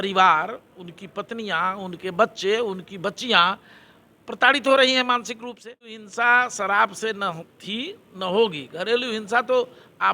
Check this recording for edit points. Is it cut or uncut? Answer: cut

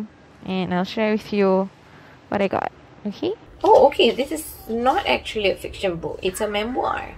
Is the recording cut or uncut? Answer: cut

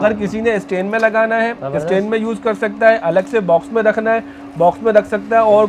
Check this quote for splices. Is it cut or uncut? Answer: uncut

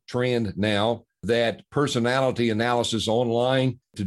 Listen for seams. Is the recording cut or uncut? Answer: cut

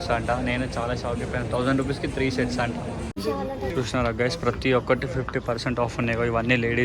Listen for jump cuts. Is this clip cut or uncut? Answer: cut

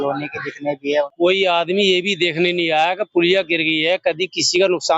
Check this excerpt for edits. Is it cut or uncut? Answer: cut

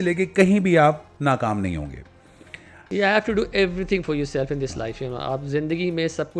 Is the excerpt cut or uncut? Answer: cut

